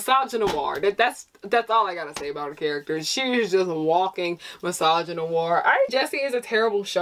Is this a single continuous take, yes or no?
no